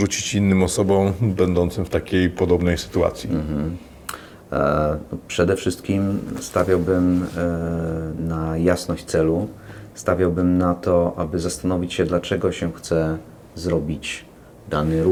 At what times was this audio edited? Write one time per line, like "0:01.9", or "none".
none